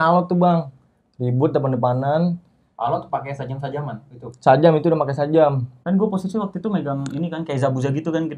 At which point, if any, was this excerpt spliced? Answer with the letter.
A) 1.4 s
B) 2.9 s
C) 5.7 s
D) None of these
C